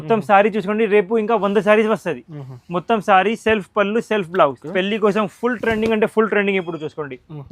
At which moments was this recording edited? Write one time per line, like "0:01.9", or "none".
0:04.6